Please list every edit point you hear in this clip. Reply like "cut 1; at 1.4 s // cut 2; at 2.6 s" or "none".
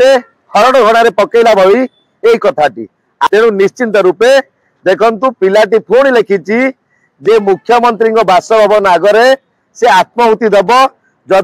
cut 1; at 3.3 s